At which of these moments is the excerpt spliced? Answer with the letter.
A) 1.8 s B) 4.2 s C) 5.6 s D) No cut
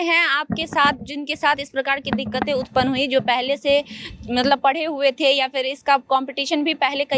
D